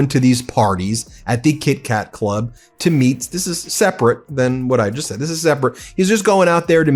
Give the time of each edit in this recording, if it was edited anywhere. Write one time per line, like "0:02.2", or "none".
none